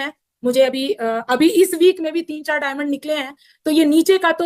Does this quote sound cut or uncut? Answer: uncut